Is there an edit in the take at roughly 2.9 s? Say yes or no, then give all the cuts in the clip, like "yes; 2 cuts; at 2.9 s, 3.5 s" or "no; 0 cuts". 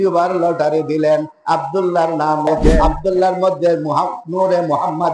yes; 1 cut; at 2.9 s